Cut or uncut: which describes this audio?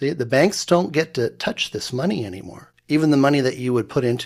uncut